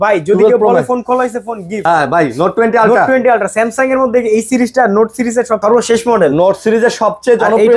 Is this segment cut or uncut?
cut